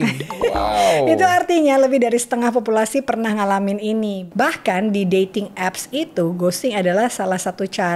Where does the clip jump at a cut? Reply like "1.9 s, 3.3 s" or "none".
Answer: none